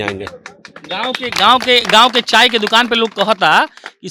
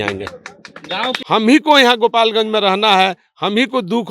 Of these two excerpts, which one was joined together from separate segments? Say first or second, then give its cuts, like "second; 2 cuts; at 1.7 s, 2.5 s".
second; 1 cut; at 1.1 s